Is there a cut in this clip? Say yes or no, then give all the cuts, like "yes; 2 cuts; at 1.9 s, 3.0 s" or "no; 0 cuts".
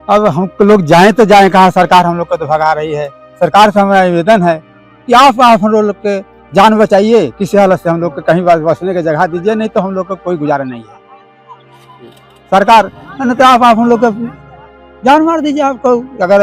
no; 0 cuts